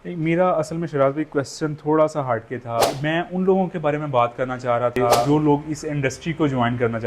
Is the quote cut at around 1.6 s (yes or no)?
no